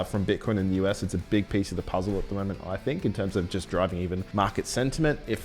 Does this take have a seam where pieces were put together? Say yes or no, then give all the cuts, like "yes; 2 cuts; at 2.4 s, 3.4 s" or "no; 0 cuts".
yes; 1 cut; at 4.2 s